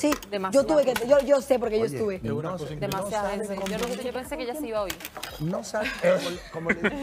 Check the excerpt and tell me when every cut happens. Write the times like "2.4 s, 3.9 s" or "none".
none